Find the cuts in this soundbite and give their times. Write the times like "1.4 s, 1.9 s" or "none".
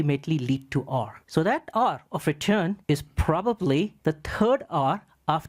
1.2 s, 2.8 s, 3.9 s